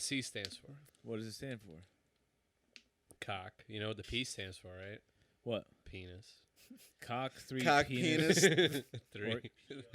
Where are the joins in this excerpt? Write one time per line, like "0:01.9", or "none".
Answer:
0:00.9